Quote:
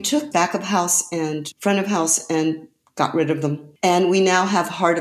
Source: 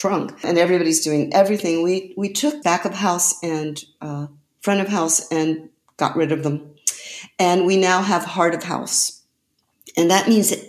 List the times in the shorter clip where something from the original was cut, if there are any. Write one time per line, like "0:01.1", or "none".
0:01.5
0:03.7

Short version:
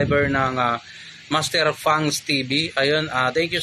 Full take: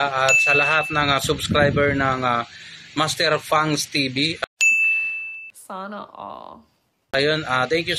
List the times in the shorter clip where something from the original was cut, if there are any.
0:02.7

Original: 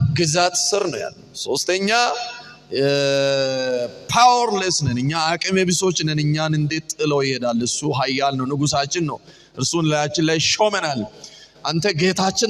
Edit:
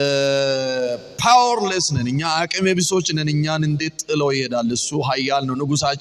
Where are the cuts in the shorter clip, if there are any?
none

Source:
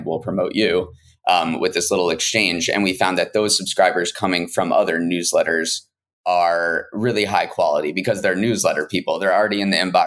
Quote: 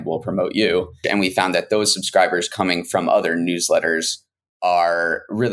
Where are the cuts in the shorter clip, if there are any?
0:01.0

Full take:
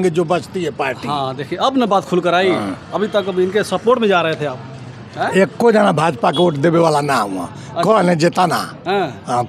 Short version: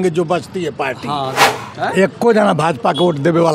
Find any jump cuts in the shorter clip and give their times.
0:01.4

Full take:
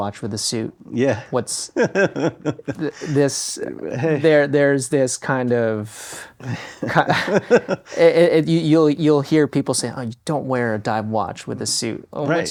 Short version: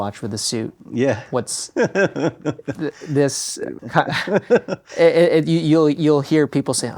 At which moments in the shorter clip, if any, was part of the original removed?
0:03.8

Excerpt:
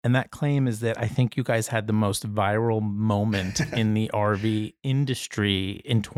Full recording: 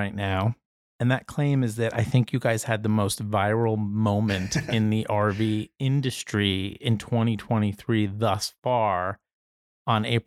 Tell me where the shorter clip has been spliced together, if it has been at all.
none

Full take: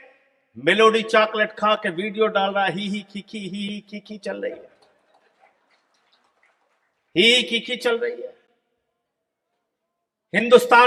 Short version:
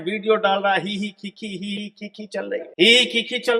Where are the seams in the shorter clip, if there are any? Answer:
0:02.7

